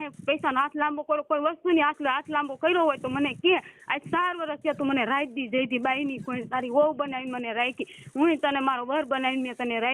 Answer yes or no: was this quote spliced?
no